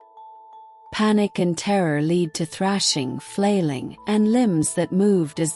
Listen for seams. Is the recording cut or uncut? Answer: cut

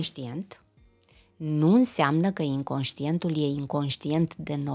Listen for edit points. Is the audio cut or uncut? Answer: uncut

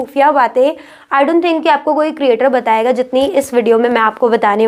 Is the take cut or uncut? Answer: uncut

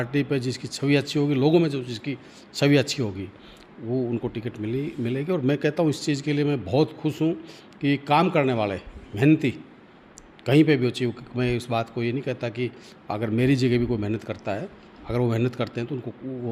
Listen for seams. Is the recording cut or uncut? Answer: uncut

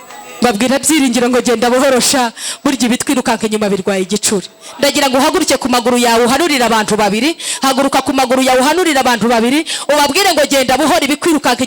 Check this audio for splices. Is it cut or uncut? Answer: uncut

